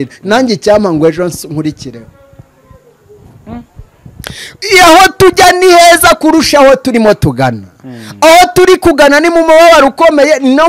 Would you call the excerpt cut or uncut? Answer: uncut